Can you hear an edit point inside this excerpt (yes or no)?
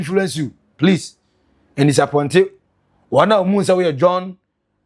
no